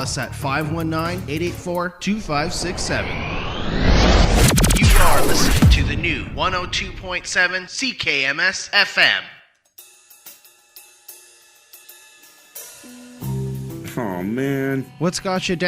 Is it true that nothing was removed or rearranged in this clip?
no; 1 cut; at 9.6 s

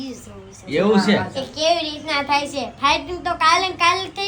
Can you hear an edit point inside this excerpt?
no; 0 cuts

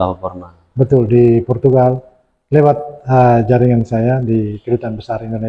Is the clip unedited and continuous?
yes; 0 cuts

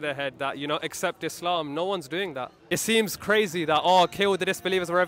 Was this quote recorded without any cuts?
no; 1 cut; at 2.5 s

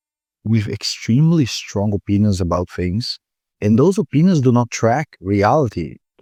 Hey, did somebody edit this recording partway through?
no; 0 cuts

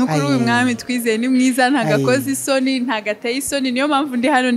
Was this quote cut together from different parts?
no; 0 cuts

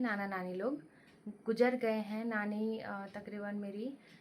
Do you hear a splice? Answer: no; 0 cuts

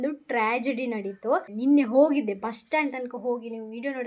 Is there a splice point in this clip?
yes; 1 cut; at 1.5 s

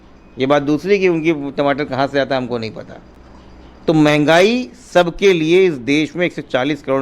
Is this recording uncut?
yes; 0 cuts

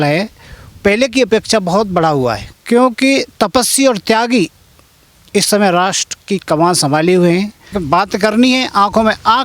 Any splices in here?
yes; 2 cuts; at 2.5 s, 7.8 s

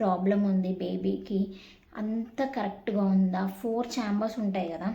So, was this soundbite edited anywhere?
no; 0 cuts

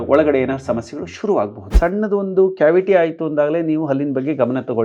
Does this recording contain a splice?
yes; 1 cut; at 1.8 s

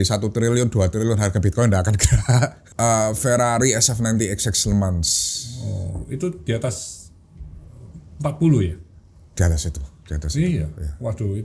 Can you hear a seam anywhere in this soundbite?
yes; 1 cut; at 2.6 s

